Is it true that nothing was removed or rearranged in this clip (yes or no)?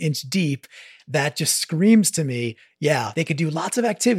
no